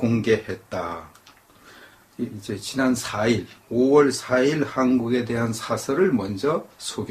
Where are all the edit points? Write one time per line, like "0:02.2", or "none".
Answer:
0:05.8